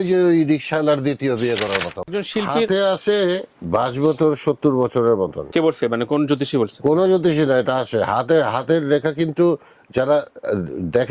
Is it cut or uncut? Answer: cut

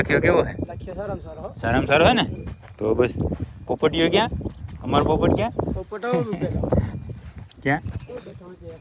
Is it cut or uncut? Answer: uncut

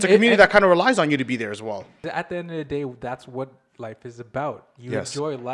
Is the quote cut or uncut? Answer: cut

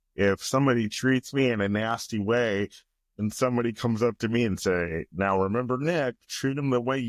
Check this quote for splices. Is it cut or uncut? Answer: uncut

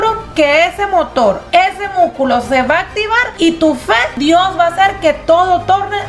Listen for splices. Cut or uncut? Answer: cut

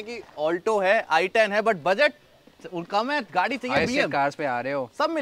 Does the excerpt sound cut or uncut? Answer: uncut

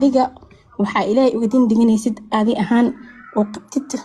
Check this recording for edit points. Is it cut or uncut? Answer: uncut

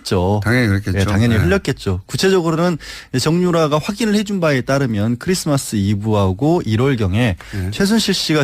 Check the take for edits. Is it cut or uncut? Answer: cut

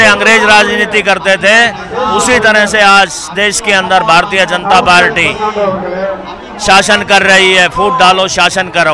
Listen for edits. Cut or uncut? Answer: uncut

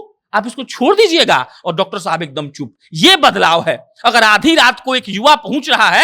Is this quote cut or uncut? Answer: uncut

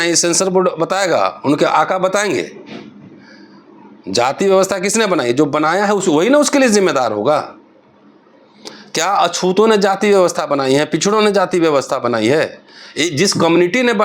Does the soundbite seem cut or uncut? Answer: uncut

